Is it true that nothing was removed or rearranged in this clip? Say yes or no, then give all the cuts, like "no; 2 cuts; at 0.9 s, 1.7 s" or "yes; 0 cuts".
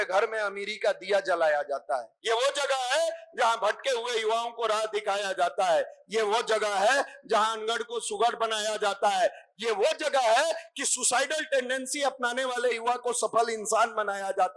no; 1 cut; at 2.1 s